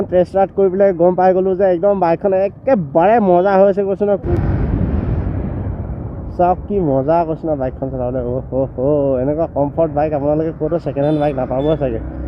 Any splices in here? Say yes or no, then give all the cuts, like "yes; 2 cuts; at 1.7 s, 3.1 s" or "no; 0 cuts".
yes; 1 cut; at 4.3 s